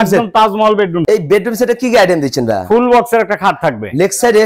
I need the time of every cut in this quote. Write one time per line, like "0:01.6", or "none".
0:01.0